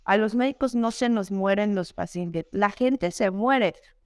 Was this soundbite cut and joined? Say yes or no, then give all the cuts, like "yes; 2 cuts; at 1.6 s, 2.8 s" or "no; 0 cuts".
no; 0 cuts